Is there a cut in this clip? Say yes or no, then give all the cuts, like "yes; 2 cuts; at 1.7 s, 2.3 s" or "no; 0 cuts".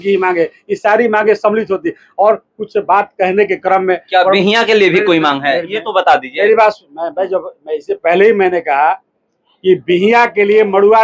no; 0 cuts